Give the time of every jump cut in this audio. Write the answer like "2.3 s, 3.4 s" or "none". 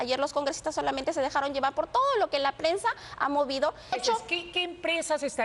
3.9 s